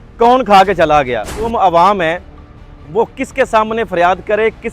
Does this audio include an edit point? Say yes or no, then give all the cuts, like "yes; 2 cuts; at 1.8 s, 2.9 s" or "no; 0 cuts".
yes; 1 cut; at 1.5 s